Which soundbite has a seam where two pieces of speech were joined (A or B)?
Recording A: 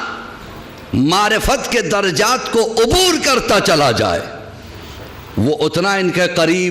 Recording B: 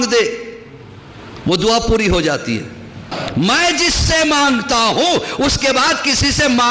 B